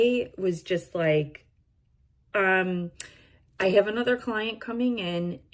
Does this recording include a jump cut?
no; 0 cuts

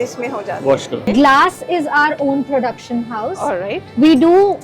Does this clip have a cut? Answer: yes; 1 cut; at 1.0 s

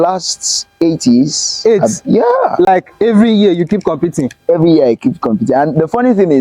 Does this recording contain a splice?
no; 0 cuts

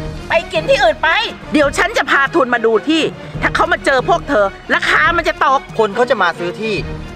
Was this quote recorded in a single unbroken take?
no; 2 cuts; at 1.4 s, 5.7 s

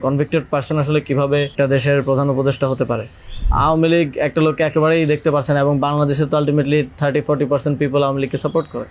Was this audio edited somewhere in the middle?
yes; 2 cuts; at 1.5 s, 3.5 s

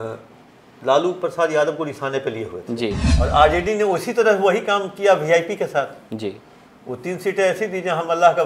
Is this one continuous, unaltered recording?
no; 1 cut; at 3.1 s

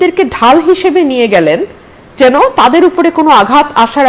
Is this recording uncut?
yes; 0 cuts

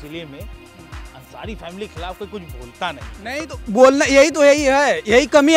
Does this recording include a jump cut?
no; 0 cuts

